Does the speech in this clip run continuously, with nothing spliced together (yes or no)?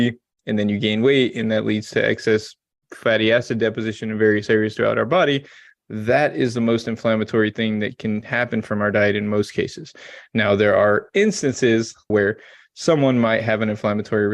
no